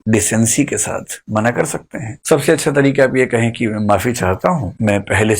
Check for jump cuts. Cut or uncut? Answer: uncut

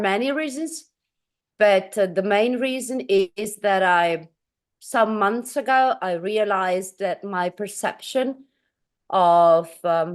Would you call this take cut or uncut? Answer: uncut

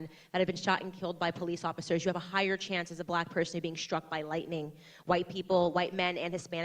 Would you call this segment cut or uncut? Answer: uncut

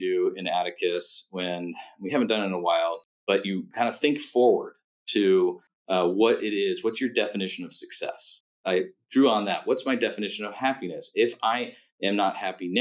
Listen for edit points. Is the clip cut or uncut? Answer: cut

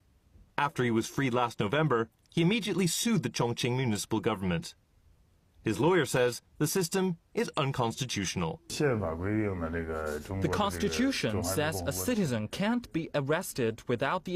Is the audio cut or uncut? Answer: uncut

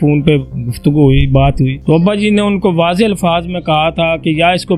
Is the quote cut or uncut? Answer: cut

